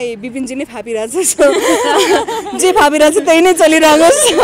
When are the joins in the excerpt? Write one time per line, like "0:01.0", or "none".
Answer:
none